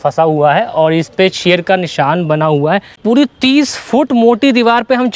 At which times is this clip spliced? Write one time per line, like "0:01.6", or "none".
0:03.0